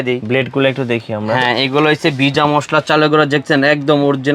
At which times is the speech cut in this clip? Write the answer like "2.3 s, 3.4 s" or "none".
none